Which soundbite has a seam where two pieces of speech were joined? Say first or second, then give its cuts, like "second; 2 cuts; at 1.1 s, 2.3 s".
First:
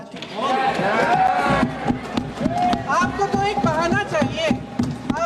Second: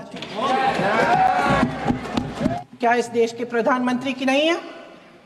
second; 1 cut; at 2.5 s